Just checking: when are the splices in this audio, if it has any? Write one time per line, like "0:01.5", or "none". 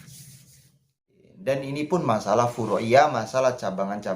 0:01.2